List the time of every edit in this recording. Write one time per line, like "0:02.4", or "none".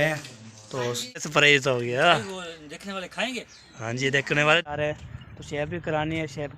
0:01.3
0:04.7